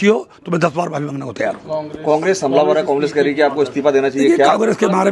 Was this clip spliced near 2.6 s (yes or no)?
no